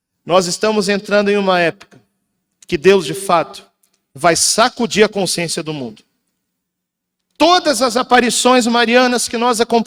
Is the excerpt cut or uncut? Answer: uncut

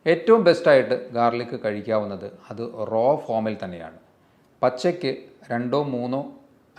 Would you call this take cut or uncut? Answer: uncut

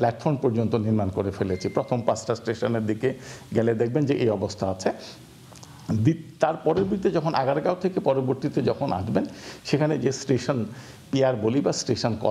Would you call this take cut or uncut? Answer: uncut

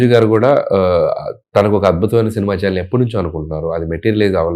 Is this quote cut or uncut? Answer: uncut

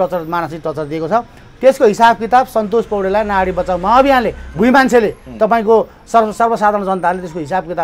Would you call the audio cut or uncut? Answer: uncut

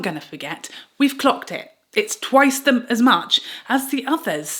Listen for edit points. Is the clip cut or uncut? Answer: uncut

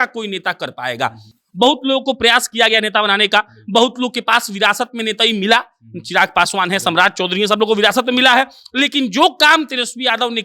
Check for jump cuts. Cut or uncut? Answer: uncut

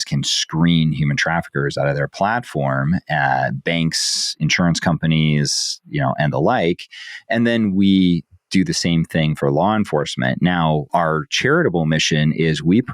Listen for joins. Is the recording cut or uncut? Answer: cut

